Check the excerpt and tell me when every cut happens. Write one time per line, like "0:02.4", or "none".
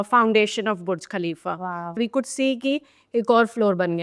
0:02.0

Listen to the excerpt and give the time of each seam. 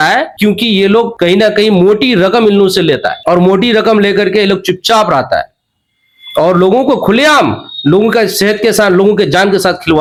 none

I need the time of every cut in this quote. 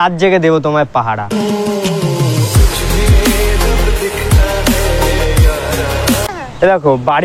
0:06.2

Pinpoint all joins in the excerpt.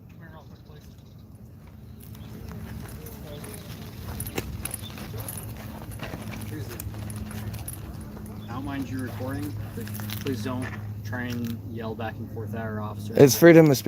none

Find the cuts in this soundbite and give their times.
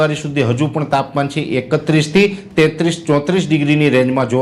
none

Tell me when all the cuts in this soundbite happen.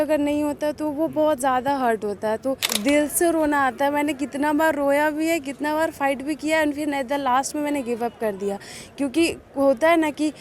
0:02.7

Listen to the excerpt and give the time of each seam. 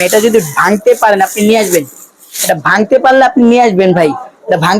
none

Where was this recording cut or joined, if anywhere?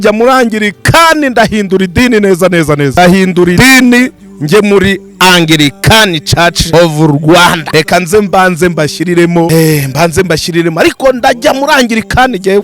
0:02.9
0:03.6
0:06.7
0:07.6
0:09.5

